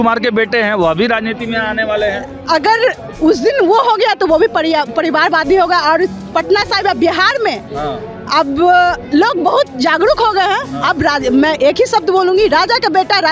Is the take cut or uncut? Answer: uncut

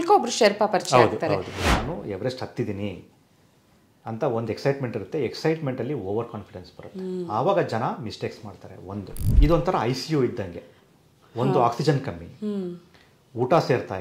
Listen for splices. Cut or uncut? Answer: cut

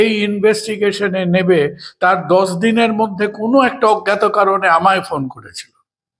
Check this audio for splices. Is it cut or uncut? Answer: uncut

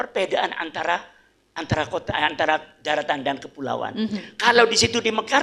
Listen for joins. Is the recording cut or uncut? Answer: uncut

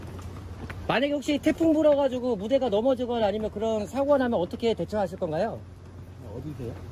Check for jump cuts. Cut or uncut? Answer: uncut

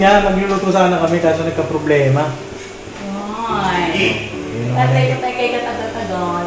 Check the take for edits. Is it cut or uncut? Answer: uncut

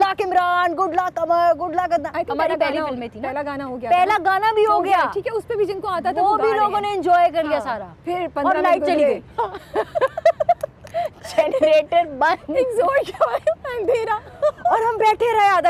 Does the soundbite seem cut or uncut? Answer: uncut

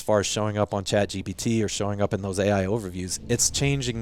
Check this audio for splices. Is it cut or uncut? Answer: cut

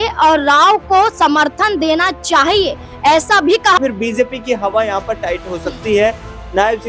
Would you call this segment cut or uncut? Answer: cut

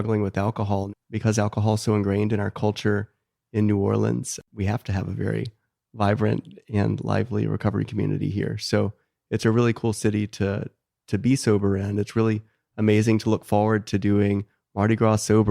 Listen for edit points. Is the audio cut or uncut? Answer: cut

